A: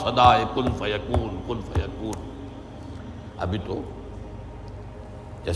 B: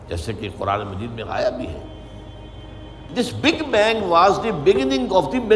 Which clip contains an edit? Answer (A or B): B